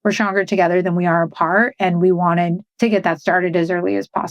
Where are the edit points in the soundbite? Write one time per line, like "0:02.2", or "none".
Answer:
0:02.7